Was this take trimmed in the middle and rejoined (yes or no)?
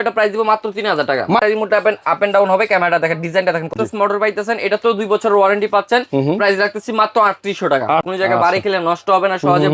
yes